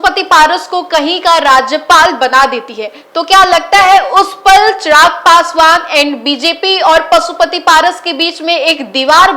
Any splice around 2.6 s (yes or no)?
no